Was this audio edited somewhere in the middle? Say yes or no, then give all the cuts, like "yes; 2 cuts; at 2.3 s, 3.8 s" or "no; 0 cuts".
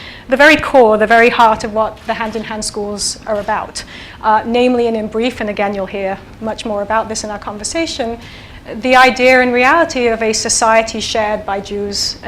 yes; 1 cut; at 6.9 s